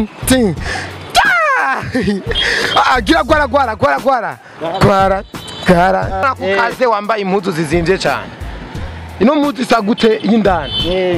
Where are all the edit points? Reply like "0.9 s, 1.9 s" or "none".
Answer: 6.2 s